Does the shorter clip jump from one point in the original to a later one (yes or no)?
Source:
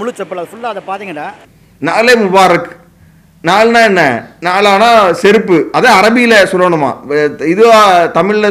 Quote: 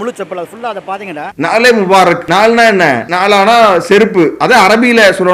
yes